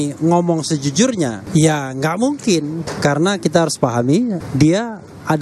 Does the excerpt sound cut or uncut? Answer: cut